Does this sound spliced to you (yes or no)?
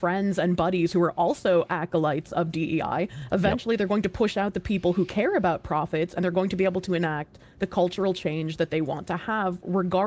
no